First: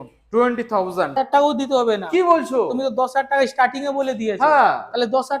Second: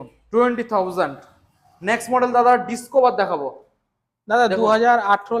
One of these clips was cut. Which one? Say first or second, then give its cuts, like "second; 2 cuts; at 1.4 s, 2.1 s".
first; 1 cut; at 1.2 s